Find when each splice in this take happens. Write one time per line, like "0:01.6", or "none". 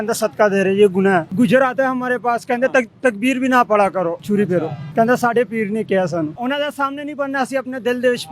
0:01.3
0:04.3
0:06.4